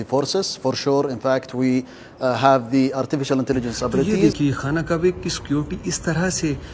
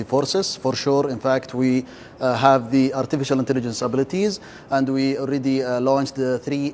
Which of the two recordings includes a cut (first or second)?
first